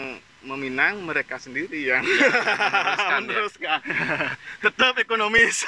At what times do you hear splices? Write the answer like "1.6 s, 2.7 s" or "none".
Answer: 3.9 s